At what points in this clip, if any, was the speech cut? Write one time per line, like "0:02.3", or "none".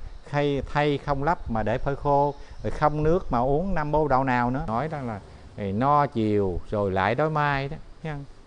0:04.7